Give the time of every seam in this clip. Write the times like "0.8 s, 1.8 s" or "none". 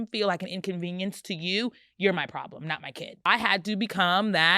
3.3 s

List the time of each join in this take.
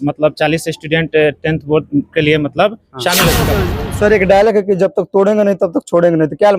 3.6 s

